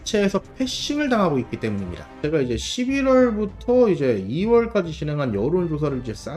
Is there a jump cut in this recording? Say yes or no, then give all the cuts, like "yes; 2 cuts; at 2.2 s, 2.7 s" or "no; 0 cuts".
yes; 1 cut; at 2.2 s